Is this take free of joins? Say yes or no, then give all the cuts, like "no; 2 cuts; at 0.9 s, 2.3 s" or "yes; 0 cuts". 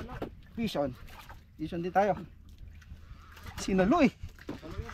yes; 0 cuts